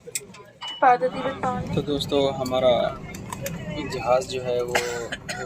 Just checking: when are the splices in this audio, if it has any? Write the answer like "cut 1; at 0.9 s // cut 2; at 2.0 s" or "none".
cut 1; at 1.5 s